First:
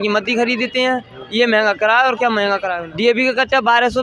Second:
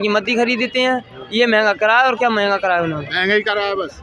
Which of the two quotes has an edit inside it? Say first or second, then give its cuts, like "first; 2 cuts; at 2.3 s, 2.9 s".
first; 1 cut; at 2.8 s